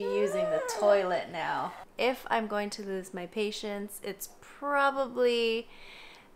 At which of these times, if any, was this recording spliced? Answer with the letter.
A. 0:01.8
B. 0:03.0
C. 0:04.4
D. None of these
A